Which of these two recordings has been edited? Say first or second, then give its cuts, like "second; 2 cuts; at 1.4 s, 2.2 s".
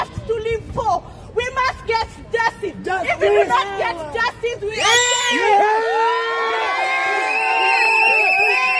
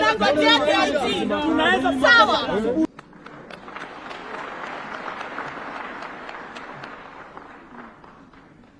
second; 1 cut; at 2.9 s